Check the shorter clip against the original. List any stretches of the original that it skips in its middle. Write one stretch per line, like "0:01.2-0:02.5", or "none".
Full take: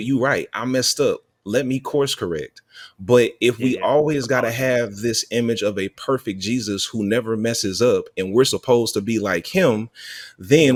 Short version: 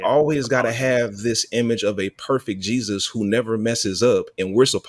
none

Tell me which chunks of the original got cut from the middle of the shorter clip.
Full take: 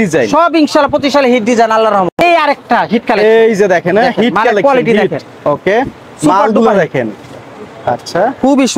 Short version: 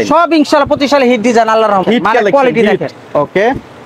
0:02.1-0:04.1

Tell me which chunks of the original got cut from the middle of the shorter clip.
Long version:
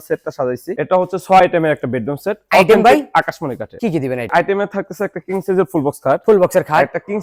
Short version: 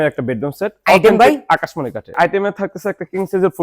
0:03.7-0:04.2

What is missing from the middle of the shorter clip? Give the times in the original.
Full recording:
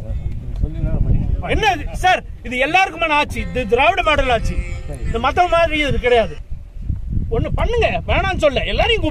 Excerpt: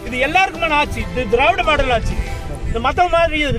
none

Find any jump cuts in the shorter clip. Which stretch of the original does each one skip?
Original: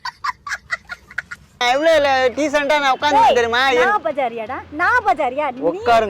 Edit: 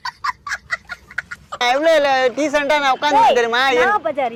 none

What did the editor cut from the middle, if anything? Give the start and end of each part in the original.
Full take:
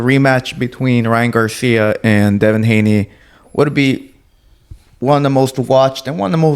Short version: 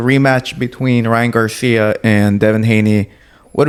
none

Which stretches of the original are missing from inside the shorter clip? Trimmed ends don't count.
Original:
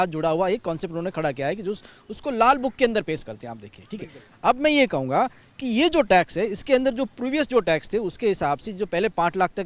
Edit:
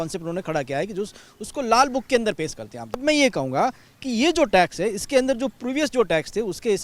0:03.7-0:04.6

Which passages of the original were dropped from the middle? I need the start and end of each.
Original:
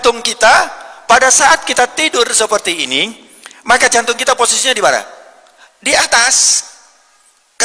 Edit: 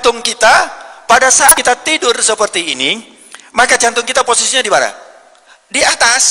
0:01.6-0:01.7

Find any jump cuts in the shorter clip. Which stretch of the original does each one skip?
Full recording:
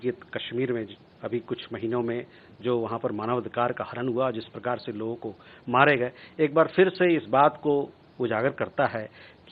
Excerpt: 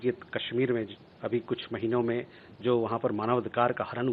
none

